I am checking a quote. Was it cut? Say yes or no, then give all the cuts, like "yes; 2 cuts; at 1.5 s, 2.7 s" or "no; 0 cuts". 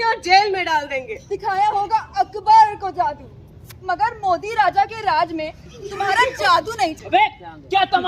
yes; 2 cuts; at 1.2 s, 6.9 s